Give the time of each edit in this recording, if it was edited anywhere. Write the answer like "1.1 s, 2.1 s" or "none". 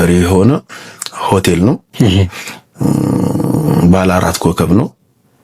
none